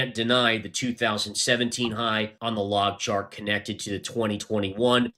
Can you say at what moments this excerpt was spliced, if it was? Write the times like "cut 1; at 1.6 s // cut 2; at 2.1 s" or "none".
cut 1; at 2.3 s